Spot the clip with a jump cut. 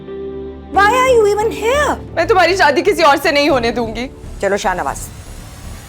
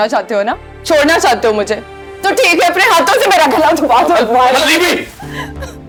first; 2 cuts; at 2.1 s, 4.2 s

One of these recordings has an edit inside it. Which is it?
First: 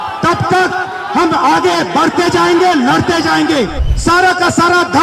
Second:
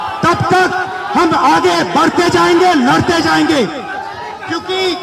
first; 1 cut; at 3.8 s

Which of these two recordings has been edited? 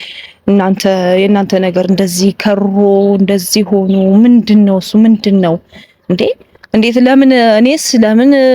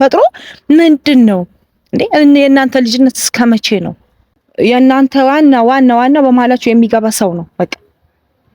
second; 1 cut; at 4.4 s

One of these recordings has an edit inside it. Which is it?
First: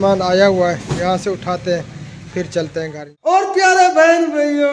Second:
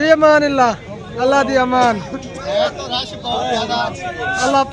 first; 1 cut; at 3.3 s

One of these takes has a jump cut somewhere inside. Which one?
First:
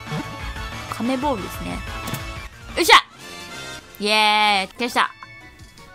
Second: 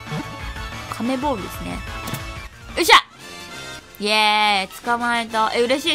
first; 1 cut; at 4.7 s

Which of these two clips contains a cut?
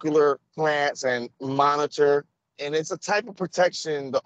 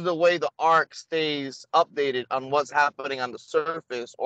first; 2 cuts; at 1.3 s, 2.5 s

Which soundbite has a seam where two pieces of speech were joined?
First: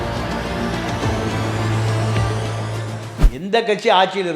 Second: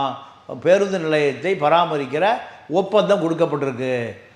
first; 1 cut; at 3.1 s

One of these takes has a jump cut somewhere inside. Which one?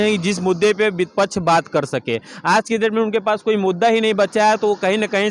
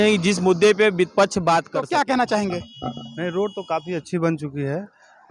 second; 1 cut; at 1.8 s

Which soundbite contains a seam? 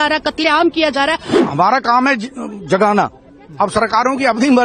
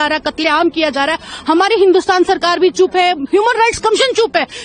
first; 1 cut; at 1.4 s

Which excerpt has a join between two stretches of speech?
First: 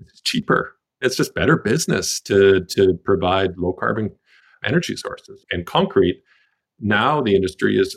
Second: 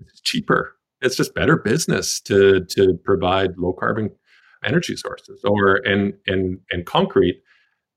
first; 1 cut; at 5.4 s

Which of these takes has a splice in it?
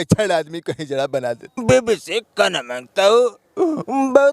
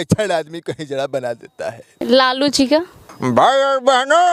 first; 1 cut; at 1.6 s

